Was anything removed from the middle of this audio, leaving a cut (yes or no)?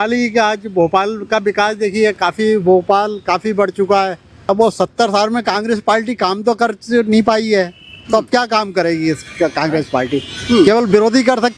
yes